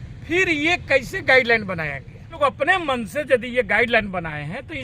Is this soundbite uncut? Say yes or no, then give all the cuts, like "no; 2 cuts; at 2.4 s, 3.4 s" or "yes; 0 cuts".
no; 1 cut; at 2.4 s